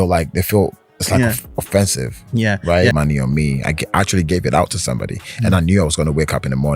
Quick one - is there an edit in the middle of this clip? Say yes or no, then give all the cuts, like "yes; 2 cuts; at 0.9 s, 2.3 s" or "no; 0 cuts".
yes; 1 cut; at 2.9 s